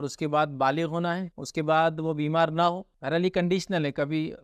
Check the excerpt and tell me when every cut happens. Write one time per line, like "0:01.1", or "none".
0:01.3
0:02.9